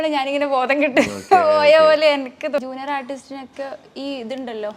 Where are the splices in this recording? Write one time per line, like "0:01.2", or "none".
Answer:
0:02.6